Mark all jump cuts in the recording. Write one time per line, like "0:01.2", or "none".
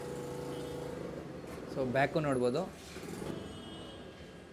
0:03.3